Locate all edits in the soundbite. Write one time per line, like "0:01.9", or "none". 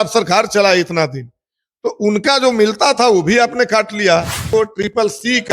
0:04.4